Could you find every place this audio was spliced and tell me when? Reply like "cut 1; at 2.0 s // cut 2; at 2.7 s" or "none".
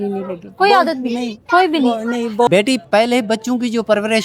cut 1; at 2.5 s